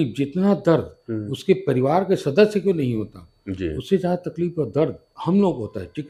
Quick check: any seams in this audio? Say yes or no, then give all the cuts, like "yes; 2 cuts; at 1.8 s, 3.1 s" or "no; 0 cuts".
no; 0 cuts